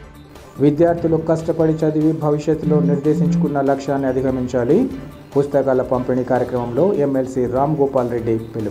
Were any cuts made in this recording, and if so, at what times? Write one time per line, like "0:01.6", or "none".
none